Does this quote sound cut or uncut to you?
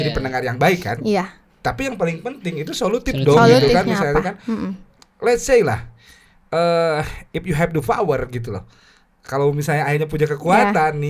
uncut